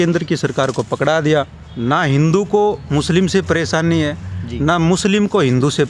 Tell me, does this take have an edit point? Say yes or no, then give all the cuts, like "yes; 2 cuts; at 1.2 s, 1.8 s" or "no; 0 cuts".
yes; 1 cut; at 1.6 s